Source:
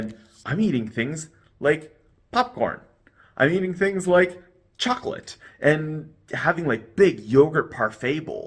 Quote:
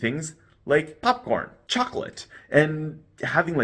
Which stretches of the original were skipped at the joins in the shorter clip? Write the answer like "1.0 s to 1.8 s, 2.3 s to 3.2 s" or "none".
1.9 s to 2.2 s, 2.9 s to 4.7 s